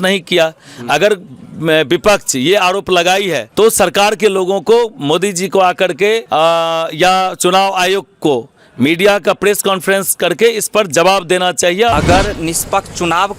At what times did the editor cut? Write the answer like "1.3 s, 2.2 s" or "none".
3.4 s, 6.2 s, 11.9 s